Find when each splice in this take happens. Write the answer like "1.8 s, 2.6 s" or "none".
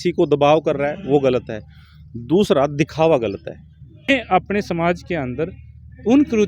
4.1 s